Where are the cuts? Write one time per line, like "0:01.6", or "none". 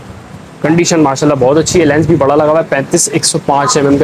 none

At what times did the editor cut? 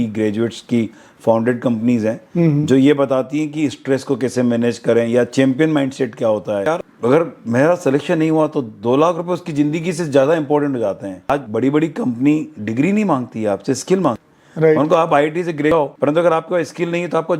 0:06.7
0:11.3
0:15.7

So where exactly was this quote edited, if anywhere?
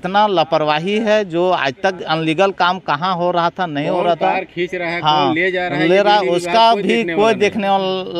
none

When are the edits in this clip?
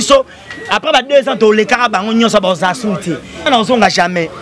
0:03.4

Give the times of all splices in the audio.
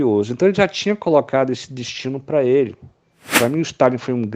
0:03.2

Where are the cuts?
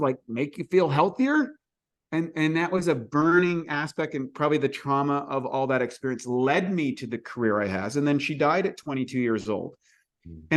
none

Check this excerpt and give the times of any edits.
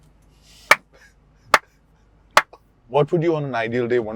0:02.8

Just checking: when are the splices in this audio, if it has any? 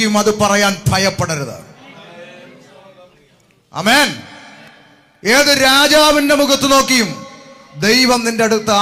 none

